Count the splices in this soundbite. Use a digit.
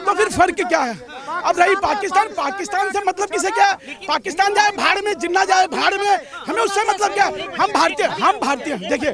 0